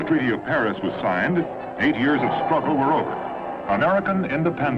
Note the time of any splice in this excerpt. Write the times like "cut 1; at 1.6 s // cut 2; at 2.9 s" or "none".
cut 1; at 1.9 s